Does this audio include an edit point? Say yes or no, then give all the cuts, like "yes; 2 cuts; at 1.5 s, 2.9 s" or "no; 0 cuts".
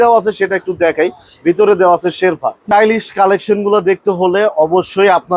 yes; 1 cut; at 2.6 s